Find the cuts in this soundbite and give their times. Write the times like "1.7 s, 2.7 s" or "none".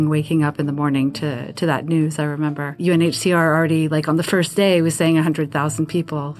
2.8 s